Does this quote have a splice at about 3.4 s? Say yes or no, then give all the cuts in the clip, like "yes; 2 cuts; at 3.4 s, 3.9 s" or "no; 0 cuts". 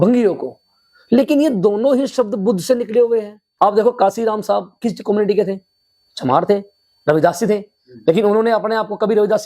yes; 1 cut; at 3.4 s